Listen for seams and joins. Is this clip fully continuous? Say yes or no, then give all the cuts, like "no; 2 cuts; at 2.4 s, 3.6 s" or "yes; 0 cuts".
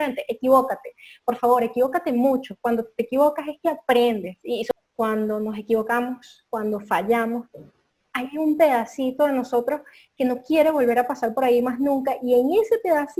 no; 1 cut; at 4.7 s